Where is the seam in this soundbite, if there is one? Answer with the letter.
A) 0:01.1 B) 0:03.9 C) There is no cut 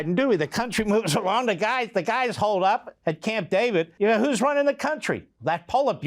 B